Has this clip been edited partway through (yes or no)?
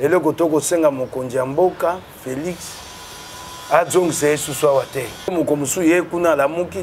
yes